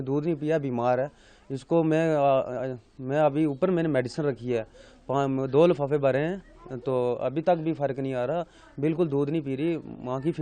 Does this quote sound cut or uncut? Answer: uncut